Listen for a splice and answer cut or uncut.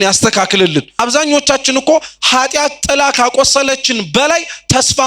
cut